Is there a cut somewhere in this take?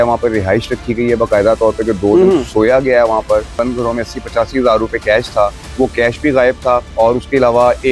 yes; 3 cuts; at 3.5 s, 5.6 s, 6.9 s

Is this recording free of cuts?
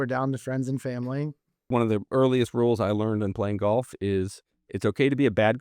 no; 1 cut; at 1.6 s

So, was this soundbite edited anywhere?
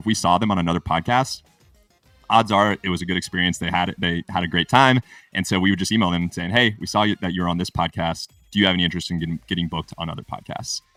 no; 0 cuts

